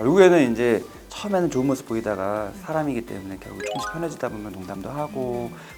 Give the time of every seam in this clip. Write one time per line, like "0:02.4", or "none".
none